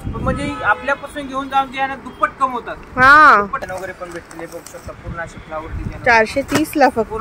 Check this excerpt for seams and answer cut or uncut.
cut